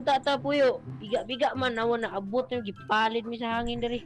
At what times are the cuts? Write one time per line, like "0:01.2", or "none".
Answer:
0:00.9